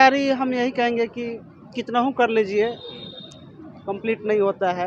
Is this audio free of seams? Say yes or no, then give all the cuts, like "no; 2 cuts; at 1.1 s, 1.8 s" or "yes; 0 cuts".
yes; 0 cuts